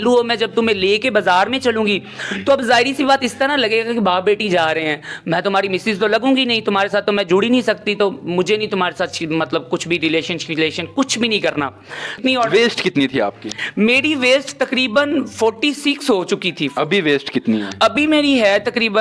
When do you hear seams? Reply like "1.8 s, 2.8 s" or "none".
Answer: 12.1 s